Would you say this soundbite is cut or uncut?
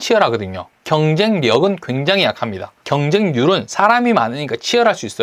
uncut